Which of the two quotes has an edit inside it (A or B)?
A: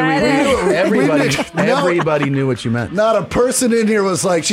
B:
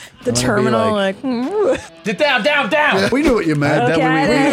B